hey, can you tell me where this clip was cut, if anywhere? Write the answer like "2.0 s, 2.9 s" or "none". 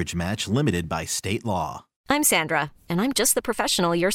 1.9 s